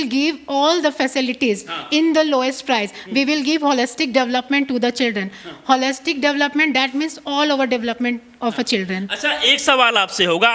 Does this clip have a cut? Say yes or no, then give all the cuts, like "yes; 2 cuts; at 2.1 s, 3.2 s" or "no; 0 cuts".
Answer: no; 0 cuts